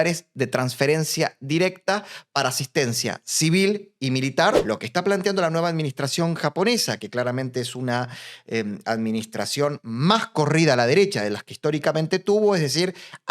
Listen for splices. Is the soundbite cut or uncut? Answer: cut